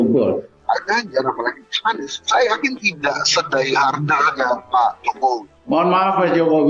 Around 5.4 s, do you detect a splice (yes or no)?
no